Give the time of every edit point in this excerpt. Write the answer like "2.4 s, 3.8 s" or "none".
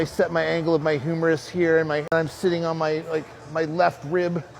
2.1 s